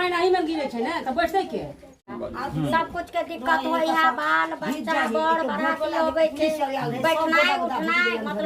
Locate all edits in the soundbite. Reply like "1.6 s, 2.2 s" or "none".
2.1 s